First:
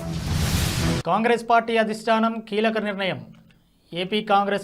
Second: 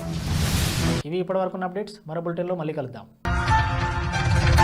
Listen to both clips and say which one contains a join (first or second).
first